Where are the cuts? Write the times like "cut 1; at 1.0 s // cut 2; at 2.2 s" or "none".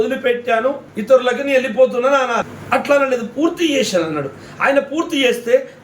cut 1; at 0.9 s // cut 2; at 2.5 s